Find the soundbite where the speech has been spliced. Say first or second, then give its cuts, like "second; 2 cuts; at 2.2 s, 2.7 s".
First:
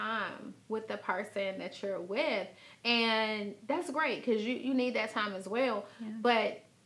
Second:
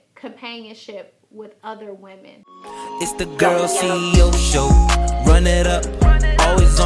second; 1 cut; at 2.4 s